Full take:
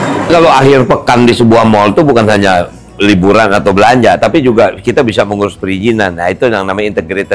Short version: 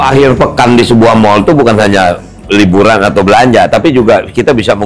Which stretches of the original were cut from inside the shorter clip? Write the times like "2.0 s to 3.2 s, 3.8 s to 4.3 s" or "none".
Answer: none